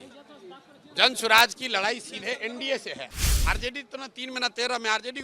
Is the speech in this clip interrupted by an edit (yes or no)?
yes